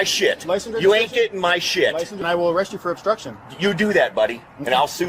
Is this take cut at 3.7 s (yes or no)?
no